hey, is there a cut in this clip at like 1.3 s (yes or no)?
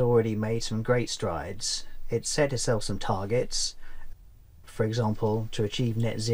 no